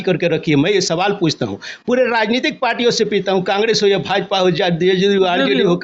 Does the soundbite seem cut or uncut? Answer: uncut